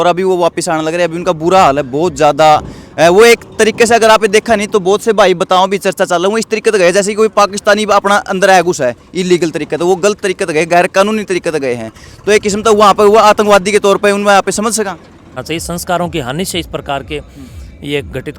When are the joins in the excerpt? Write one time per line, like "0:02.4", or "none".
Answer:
0:15.4